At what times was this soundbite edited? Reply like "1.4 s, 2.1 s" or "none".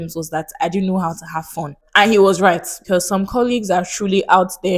1.8 s, 2.8 s